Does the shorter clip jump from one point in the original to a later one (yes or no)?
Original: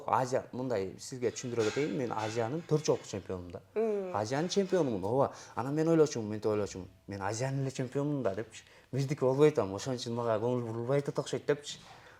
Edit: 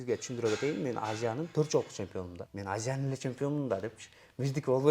yes